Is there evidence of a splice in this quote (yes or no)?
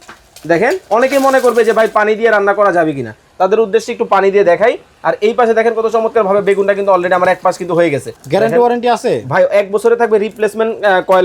yes